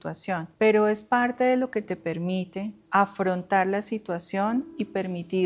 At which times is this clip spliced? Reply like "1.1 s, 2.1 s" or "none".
none